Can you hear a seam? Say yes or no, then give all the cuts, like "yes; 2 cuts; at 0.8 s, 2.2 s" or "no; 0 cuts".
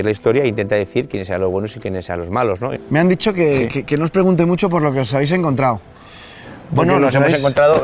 yes; 1 cut; at 2.7 s